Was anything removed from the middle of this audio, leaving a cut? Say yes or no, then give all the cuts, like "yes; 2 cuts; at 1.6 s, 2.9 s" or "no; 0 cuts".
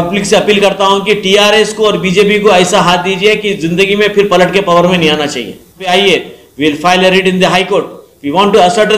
yes; 1 cut; at 5.9 s